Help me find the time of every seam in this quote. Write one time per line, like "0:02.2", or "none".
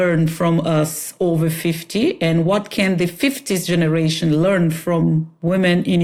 none